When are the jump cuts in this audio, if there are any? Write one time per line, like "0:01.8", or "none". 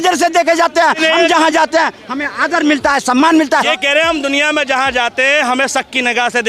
0:03.7